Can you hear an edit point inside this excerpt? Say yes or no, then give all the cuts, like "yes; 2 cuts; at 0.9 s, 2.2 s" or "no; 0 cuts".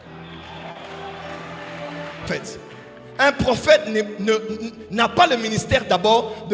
yes; 1 cut; at 2.3 s